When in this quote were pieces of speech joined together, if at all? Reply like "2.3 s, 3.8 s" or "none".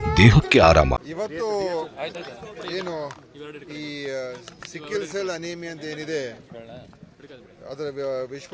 1.0 s